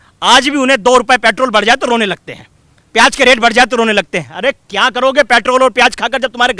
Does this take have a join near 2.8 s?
no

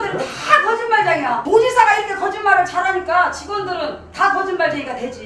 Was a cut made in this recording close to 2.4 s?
yes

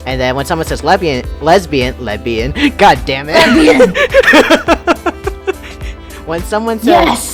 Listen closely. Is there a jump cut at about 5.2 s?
no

